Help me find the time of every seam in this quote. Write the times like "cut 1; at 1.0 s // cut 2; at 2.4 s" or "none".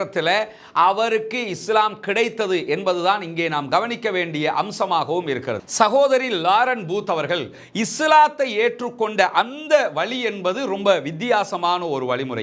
cut 1; at 5.6 s